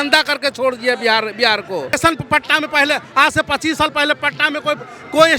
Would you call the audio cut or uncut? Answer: cut